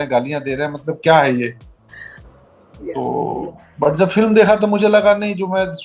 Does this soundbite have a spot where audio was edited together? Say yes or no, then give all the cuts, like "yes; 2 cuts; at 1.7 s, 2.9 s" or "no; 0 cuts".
no; 0 cuts